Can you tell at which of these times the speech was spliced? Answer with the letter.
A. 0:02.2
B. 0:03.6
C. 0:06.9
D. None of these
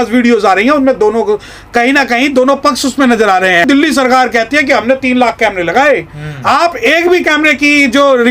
B